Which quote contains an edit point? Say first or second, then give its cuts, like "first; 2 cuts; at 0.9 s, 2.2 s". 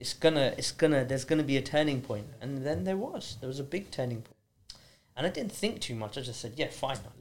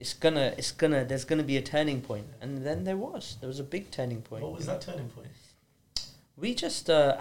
first; 1 cut; at 4.2 s